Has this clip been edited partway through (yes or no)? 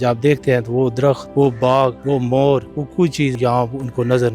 yes